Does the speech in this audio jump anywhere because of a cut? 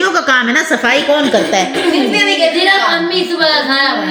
no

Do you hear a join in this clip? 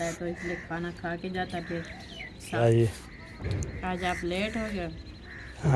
yes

